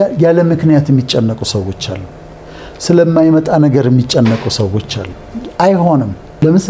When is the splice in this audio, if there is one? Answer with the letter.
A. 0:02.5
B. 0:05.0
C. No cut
C